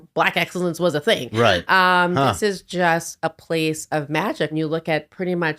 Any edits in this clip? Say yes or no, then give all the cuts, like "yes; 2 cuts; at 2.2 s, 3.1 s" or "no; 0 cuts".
yes; 1 cut; at 4.5 s